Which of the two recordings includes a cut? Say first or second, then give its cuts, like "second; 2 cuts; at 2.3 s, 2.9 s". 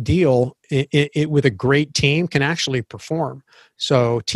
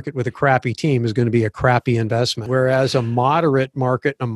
second; 1 cut; at 2.4 s